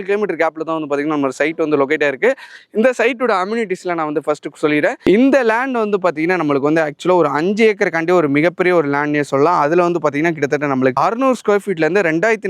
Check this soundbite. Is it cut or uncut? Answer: uncut